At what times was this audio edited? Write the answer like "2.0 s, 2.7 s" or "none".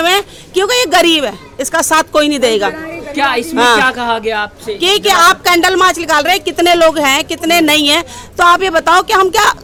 none